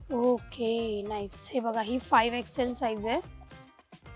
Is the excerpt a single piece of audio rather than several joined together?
no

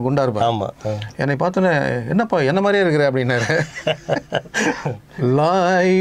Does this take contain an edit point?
yes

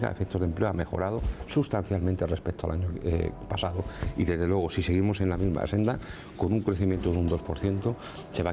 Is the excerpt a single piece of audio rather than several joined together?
yes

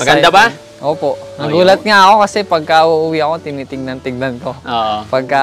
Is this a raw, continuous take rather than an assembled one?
yes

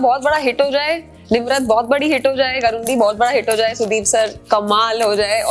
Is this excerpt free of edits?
yes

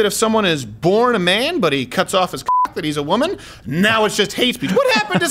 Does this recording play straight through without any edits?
yes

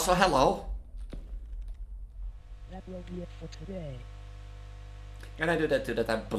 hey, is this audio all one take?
no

